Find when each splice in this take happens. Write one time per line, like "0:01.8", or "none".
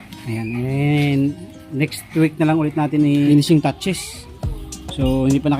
0:03.3